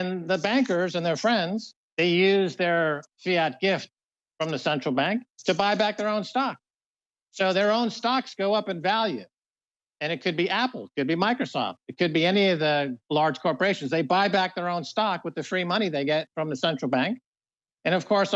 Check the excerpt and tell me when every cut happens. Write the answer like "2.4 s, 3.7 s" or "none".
none

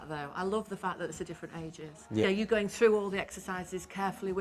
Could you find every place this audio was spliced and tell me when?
2.2 s

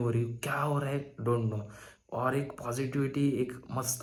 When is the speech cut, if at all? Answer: none

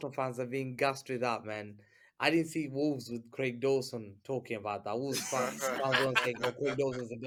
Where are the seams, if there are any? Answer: none

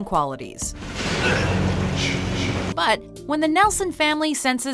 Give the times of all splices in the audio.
none

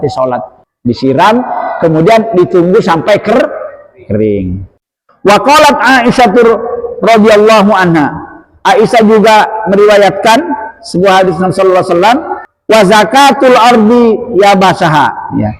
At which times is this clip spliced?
none

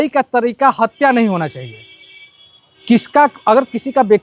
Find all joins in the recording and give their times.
none

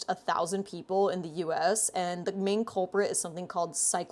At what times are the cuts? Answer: none

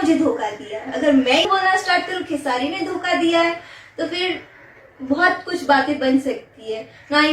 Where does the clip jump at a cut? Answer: 1.4 s

